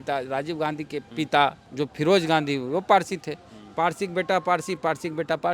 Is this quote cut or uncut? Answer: cut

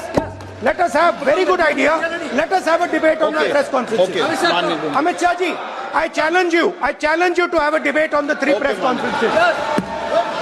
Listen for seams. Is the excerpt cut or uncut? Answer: uncut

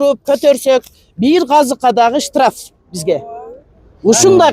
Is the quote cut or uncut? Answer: uncut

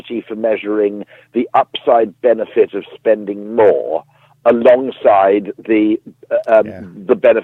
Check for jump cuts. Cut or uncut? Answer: uncut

